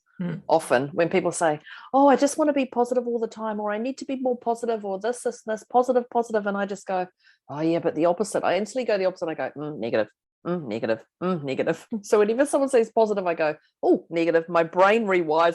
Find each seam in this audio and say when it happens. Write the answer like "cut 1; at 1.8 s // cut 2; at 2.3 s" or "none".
cut 1; at 10.3 s